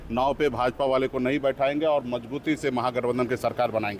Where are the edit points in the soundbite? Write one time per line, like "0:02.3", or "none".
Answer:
none